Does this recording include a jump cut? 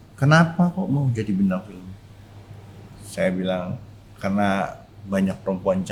no; 0 cuts

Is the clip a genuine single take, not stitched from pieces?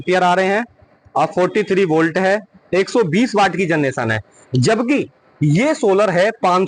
yes; 0 cuts

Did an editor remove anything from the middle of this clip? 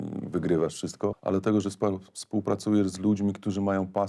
yes; 1 cut; at 1.2 s

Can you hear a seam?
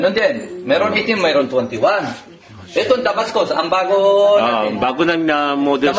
no; 0 cuts

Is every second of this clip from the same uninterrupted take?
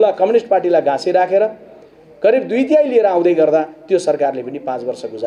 yes; 0 cuts

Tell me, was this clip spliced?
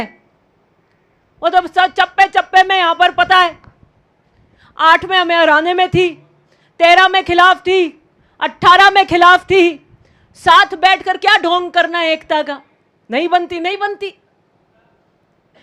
no; 0 cuts

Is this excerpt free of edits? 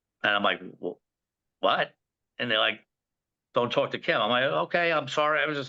yes; 0 cuts

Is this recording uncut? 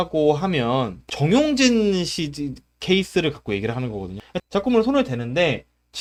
yes; 0 cuts

